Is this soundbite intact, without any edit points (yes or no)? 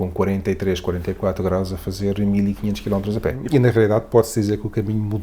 no